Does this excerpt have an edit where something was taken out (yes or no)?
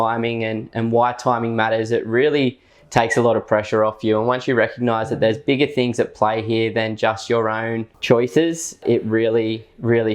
yes